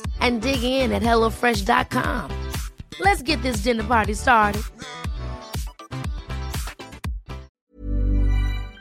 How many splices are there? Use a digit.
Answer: 1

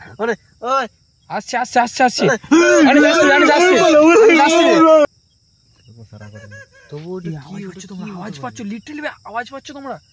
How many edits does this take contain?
1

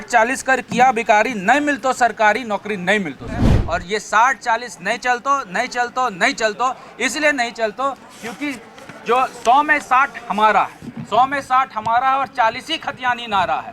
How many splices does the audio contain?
1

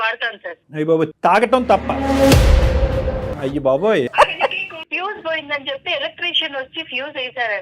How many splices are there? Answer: 2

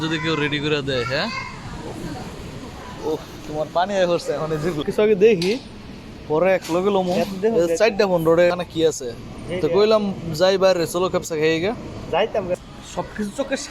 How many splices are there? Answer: 3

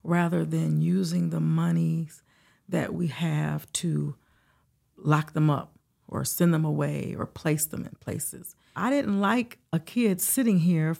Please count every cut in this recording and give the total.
1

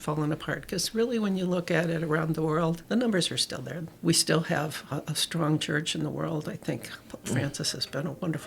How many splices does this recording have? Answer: 1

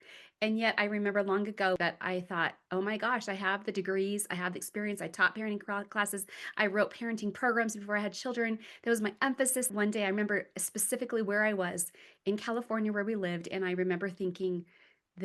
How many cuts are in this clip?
2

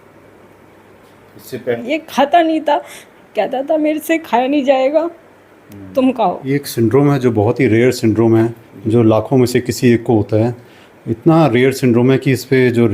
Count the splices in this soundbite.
2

